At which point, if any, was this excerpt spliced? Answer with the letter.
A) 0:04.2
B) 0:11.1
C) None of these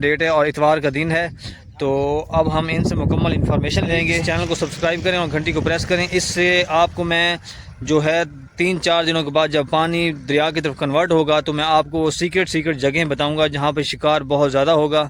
A